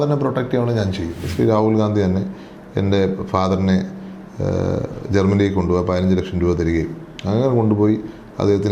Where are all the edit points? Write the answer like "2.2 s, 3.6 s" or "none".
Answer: 1.2 s